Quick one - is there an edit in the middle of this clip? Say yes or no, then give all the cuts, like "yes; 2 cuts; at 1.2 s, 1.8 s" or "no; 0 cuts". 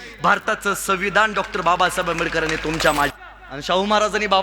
yes; 1 cut; at 3.1 s